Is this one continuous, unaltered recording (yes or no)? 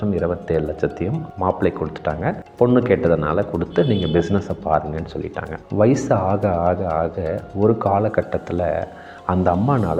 no